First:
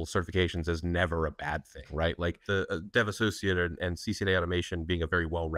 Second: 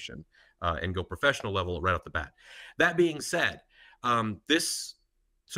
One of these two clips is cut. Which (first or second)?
first